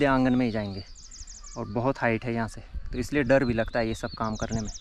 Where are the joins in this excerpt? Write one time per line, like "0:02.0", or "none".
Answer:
none